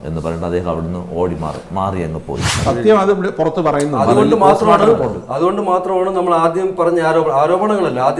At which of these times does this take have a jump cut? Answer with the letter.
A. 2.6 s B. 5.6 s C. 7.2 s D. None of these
A